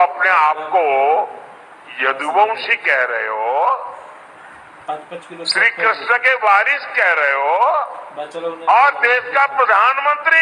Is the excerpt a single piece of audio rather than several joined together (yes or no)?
yes